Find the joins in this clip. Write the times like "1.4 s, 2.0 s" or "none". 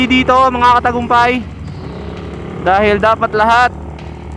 none